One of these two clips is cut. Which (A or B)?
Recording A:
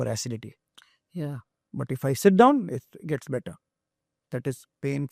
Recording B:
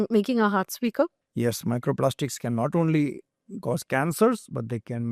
B